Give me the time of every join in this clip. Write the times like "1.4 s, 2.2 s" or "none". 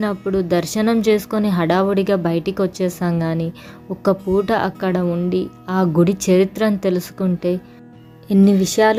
none